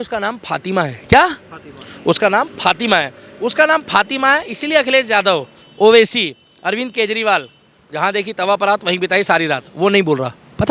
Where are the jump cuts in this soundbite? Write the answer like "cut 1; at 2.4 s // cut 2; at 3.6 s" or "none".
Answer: none